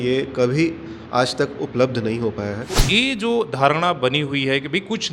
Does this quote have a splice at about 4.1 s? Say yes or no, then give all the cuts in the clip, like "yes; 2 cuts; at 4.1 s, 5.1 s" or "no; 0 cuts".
no; 1 cut; at 2.7 s